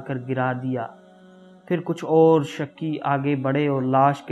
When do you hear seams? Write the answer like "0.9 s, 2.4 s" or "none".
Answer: none